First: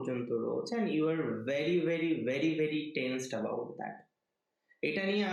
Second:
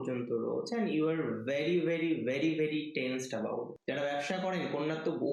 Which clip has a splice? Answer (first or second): second